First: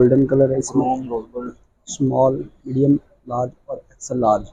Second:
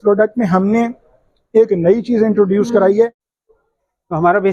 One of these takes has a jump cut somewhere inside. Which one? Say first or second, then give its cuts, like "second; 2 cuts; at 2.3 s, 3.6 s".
second; 1 cut; at 3.3 s